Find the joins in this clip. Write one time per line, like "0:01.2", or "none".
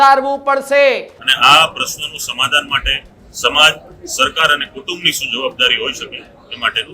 0:01.2